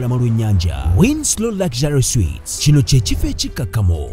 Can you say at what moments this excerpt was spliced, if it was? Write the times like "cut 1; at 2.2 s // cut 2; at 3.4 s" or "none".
none

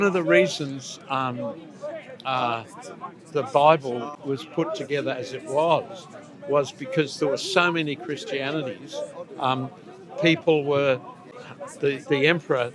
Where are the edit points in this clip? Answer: cut 1; at 4.1 s // cut 2; at 11.2 s

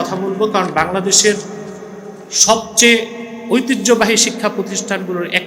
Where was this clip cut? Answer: none

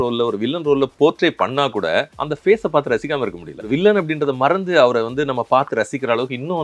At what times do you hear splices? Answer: cut 1; at 2.2 s // cut 2; at 3.6 s

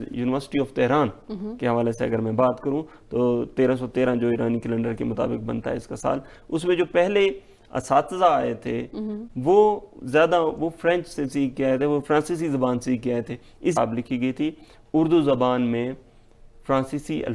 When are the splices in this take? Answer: cut 1; at 13.8 s

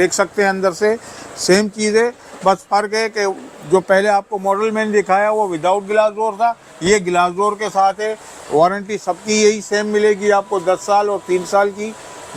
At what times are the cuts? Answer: none

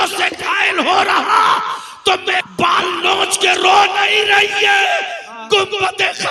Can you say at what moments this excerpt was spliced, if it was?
cut 1; at 2.4 s

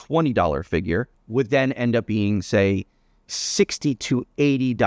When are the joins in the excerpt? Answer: cut 1; at 1.2 s

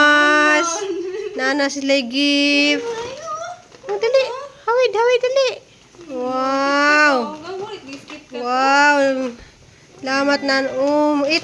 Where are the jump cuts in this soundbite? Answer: none

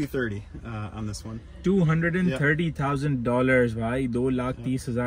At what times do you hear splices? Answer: none

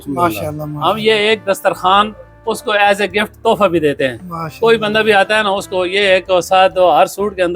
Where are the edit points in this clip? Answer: cut 1; at 1.0 s

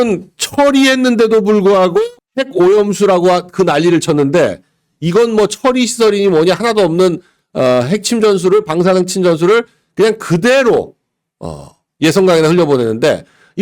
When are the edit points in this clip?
none

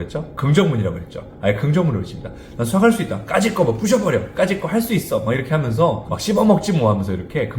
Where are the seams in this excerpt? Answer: cut 1; at 6.1 s

